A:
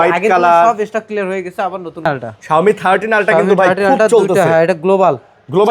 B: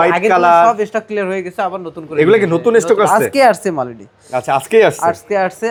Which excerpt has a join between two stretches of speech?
A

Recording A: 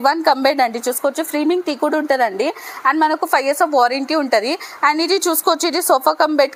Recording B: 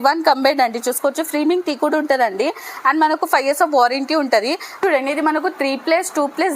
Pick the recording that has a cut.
B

